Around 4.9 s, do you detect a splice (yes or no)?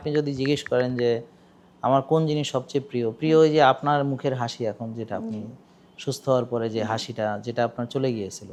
no